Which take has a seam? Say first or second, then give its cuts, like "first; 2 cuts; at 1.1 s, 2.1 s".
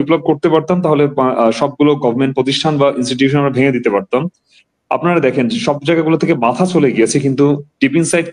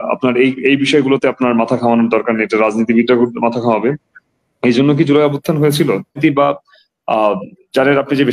second; 1 cut; at 6.2 s